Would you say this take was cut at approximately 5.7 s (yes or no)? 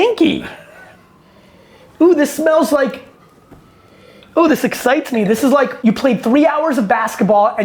yes